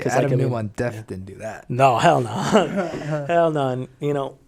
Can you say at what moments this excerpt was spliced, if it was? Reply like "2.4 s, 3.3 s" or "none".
none